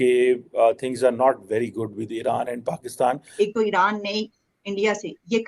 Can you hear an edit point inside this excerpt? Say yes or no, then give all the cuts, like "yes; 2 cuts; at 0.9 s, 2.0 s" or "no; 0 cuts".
yes; 1 cut; at 3.2 s